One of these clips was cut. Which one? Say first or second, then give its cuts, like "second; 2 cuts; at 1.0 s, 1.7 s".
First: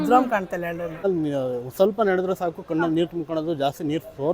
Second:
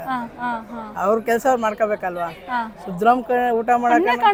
first; 1 cut; at 1.0 s